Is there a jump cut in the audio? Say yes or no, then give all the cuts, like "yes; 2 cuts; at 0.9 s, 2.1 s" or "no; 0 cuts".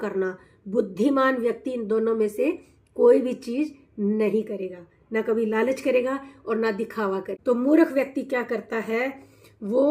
yes; 1 cut; at 7.3 s